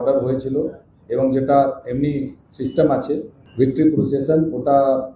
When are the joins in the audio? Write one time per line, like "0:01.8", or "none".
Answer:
0:03.4

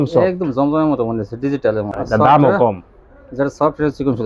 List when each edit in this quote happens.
0:02.0

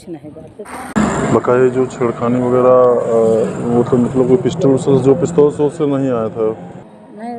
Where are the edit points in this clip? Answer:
none

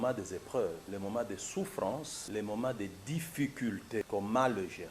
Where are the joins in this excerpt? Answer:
0:00.8
0:02.2
0:04.1

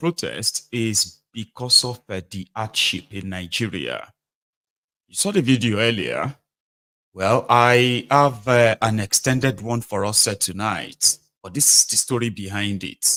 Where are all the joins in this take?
none

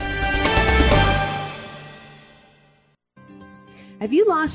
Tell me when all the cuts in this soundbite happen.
0:03.2

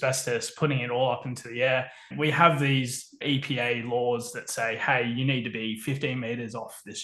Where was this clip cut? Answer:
0:02.2

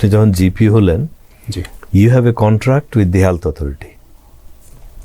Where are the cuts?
none

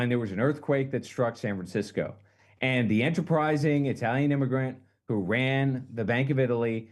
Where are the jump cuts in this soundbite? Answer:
none

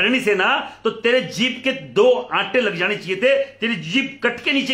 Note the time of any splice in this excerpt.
none

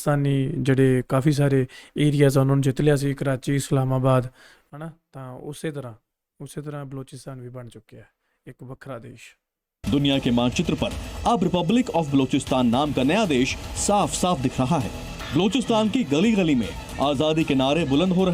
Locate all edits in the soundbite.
none

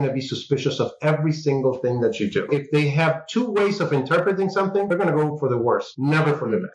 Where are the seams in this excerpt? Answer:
0:02.5
0:04.9

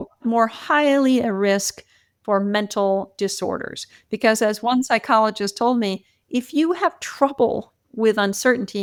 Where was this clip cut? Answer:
none

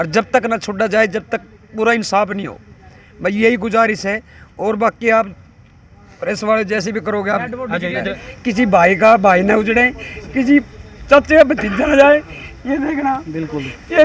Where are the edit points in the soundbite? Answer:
0:08.2

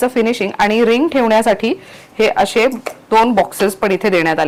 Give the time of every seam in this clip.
none

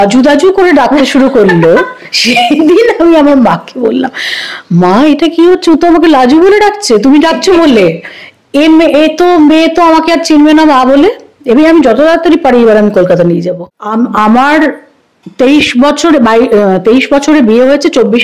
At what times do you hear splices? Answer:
0:13.5

